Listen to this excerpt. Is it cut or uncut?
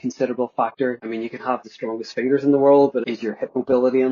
cut